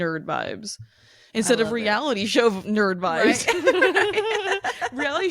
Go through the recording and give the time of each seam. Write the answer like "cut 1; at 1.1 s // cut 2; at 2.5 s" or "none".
none